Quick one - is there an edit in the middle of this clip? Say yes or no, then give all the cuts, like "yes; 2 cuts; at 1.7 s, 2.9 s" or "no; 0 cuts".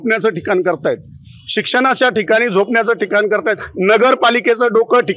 no; 0 cuts